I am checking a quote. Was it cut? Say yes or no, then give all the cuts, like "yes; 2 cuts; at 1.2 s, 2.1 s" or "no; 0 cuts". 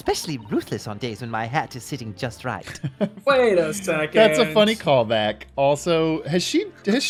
no; 0 cuts